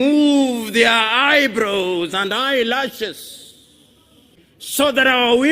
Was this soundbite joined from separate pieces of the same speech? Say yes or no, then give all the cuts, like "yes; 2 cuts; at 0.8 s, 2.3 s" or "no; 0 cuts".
yes; 1 cut; at 4.4 s